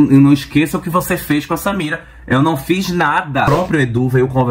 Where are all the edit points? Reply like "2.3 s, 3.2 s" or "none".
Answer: 3.5 s

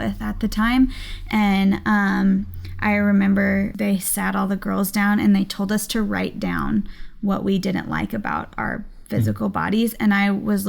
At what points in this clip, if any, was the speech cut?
3.7 s

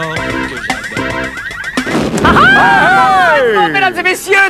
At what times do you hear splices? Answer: none

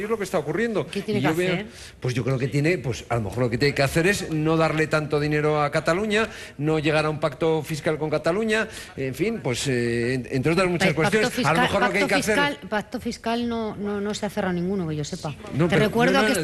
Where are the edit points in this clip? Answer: 1.2 s

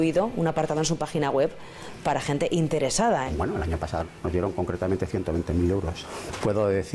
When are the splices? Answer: 3.3 s, 6.0 s

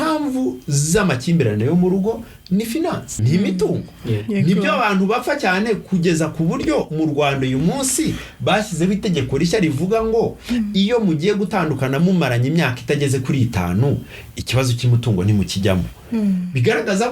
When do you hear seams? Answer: 3.2 s

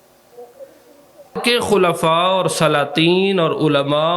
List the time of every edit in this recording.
1.4 s

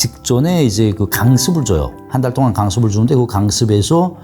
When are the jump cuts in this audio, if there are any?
2.0 s

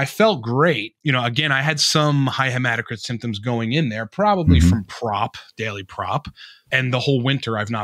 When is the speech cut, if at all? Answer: 0.9 s, 6.6 s

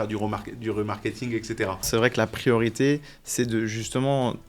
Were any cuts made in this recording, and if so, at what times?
1.9 s

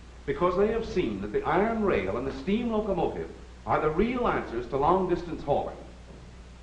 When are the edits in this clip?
3.2 s

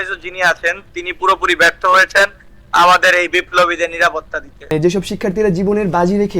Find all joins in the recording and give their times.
4.7 s

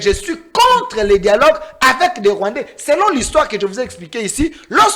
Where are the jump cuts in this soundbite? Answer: none

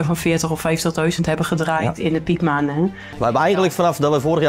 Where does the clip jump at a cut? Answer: 3.0 s

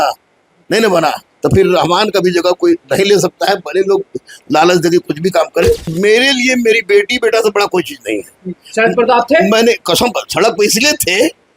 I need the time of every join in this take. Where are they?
5.9 s

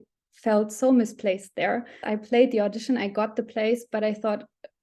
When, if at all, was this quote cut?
2.1 s

